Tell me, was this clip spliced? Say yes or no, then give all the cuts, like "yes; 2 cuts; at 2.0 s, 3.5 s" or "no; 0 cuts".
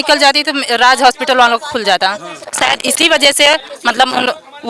no; 0 cuts